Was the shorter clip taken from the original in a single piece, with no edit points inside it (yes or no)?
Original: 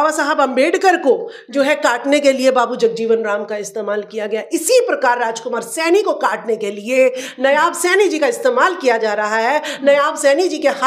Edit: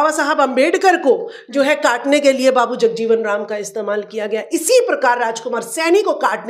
yes